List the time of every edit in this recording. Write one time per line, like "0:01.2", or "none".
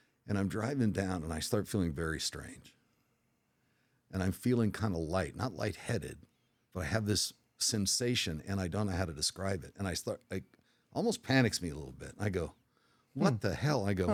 none